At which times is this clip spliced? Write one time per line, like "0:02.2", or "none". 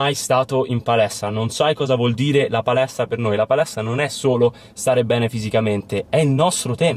0:06.0